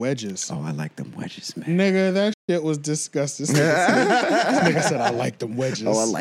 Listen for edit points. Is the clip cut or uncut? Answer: uncut